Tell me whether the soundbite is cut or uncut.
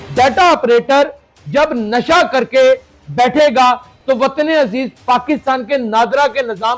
uncut